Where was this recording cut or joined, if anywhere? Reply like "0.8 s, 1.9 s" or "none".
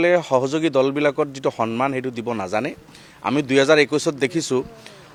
none